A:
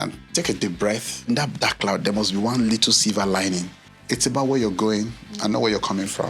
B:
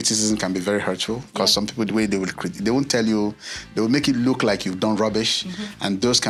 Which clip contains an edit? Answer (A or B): A